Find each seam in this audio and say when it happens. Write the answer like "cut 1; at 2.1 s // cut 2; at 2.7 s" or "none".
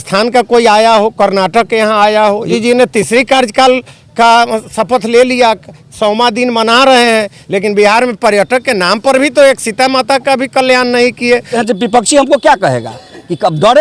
cut 1; at 2.5 s // cut 2; at 11.5 s